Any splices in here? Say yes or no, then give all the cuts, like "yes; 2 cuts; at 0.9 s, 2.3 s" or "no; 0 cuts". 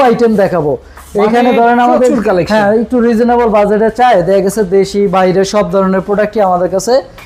no; 0 cuts